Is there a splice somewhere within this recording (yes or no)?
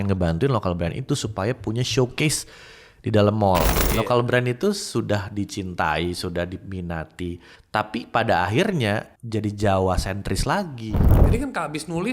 yes